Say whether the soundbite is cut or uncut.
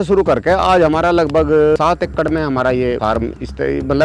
cut